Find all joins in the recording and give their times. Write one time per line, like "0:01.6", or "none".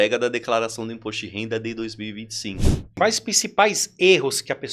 0:02.8